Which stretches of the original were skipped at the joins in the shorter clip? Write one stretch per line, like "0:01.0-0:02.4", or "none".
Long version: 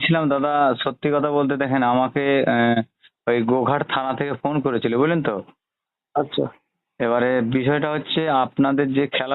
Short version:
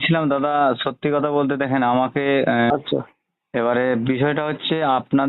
0:02.7-0:06.2